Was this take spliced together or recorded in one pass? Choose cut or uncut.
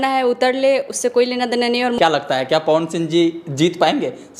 cut